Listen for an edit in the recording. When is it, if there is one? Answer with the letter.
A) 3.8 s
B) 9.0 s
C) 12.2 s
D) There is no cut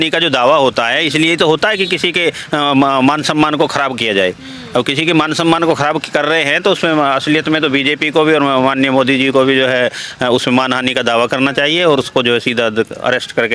D